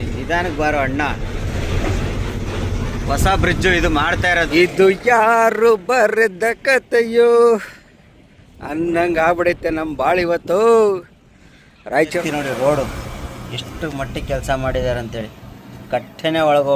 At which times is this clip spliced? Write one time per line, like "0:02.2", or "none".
0:04.5
0:12.2